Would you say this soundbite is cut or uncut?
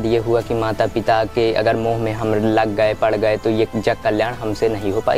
uncut